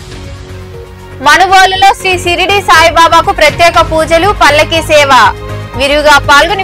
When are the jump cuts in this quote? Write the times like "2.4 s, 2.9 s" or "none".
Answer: 1.2 s